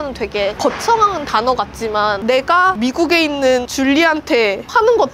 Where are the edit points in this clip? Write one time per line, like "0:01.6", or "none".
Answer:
none